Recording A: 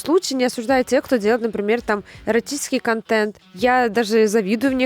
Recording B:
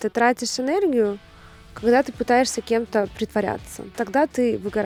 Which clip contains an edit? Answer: A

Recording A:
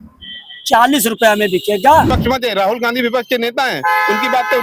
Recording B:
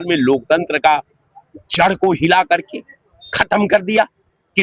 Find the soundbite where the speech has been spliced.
A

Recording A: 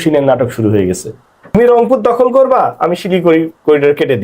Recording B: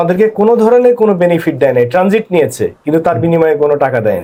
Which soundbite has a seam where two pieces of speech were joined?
A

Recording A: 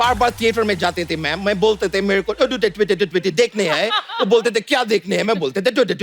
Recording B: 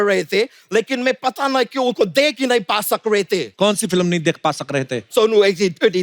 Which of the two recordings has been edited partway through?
B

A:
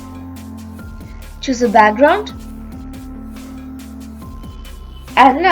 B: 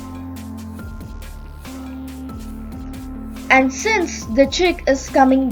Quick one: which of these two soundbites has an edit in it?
A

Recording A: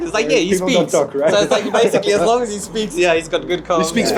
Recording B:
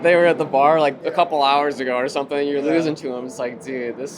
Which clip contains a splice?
B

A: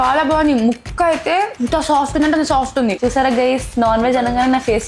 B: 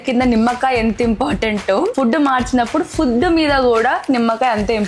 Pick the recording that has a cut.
A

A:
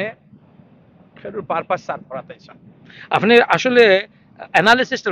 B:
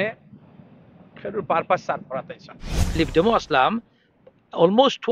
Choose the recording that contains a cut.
B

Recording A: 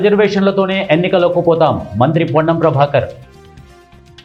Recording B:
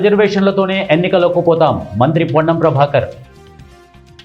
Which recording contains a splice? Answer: B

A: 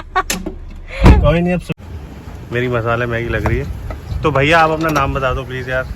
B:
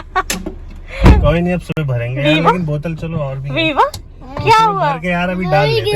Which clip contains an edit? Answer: A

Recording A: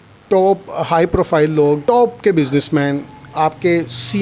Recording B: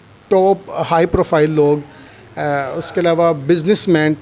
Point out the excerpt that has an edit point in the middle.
A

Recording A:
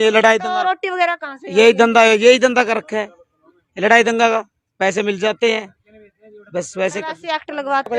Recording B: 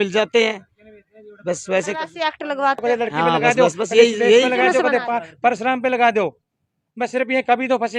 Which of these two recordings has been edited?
B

